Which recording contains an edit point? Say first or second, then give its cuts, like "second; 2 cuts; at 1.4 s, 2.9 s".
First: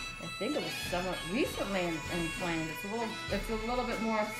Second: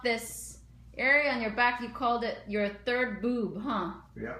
first; 1 cut; at 1.2 s